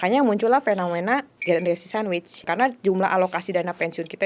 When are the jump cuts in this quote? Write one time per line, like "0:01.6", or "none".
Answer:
0:01.3
0:02.4

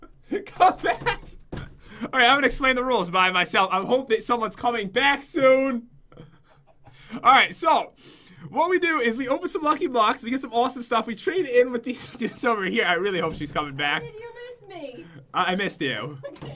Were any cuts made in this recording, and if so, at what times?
0:12.1

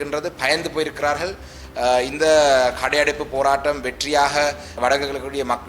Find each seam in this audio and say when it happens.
0:04.8

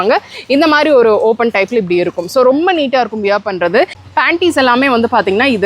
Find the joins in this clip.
0:04.0

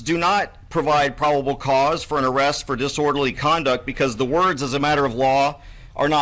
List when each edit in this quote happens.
none

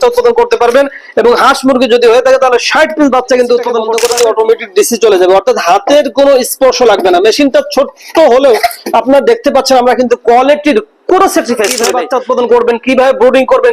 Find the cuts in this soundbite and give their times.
0:03.9
0:11.9

